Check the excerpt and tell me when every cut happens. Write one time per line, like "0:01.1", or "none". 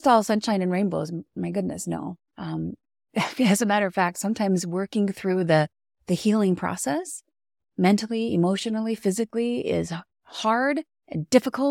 0:01.3